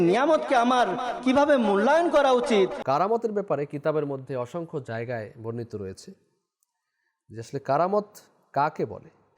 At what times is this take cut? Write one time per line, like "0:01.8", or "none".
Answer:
0:02.8